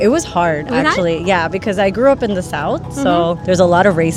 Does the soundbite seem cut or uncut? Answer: uncut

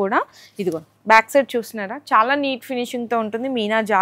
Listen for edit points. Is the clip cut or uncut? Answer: uncut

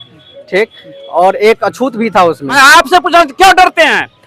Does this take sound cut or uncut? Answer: cut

